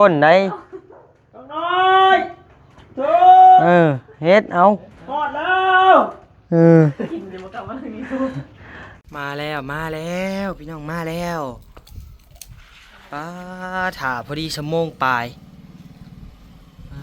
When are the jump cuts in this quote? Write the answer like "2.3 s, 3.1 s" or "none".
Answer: 9.0 s